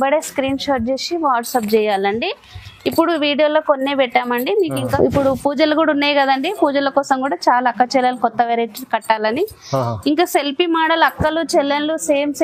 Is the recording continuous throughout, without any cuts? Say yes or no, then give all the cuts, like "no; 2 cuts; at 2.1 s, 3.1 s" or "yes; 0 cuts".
no; 1 cut; at 4.9 s